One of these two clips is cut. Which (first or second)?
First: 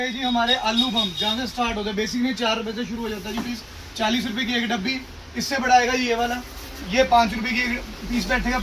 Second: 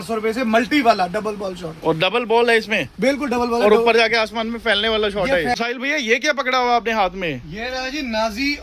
second